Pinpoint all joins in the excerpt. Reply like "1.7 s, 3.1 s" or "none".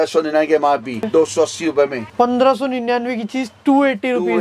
1.1 s, 2.0 s